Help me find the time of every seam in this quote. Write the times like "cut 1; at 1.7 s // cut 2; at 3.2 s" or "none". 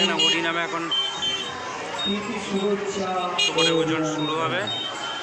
none